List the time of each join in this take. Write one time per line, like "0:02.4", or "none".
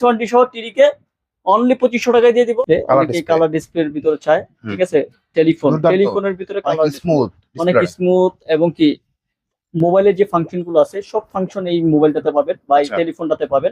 0:02.6